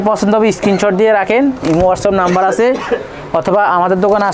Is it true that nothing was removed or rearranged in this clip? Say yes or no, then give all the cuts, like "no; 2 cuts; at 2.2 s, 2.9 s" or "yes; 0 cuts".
yes; 0 cuts